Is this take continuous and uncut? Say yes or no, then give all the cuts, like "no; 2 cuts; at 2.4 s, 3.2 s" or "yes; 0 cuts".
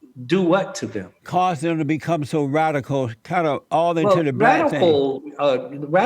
yes; 0 cuts